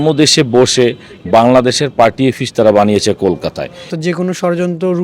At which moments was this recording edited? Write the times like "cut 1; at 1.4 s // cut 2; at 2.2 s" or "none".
cut 1; at 3.9 s